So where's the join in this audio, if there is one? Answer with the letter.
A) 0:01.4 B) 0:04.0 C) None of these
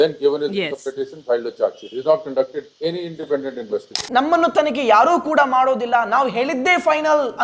B